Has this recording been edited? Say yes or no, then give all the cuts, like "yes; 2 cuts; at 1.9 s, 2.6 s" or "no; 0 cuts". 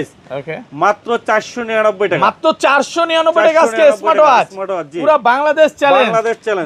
no; 0 cuts